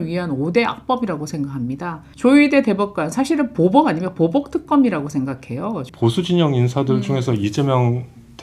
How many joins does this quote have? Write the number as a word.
two